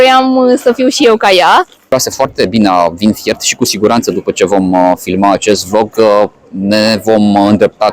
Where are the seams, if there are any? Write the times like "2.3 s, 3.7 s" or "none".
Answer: 1.9 s